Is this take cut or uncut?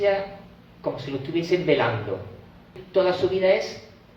cut